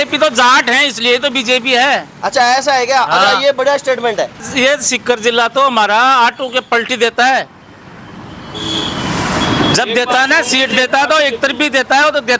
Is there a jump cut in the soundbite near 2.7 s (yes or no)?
no